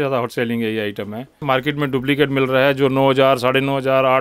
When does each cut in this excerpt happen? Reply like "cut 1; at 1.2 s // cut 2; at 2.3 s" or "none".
cut 1; at 1.4 s